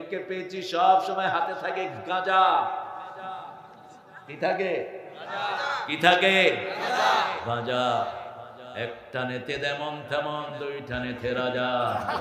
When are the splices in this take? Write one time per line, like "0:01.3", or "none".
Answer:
none